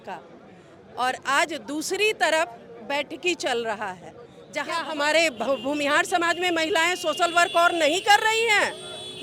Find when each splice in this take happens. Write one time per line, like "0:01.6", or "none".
0:04.8